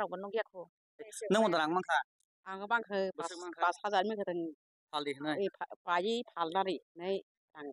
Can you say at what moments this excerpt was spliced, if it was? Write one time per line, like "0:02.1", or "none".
0:01.2